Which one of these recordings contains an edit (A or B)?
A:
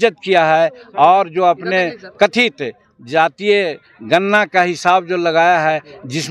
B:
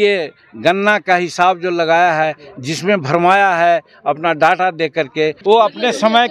B